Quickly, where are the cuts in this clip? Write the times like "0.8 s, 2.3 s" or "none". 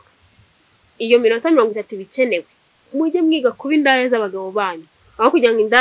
2.8 s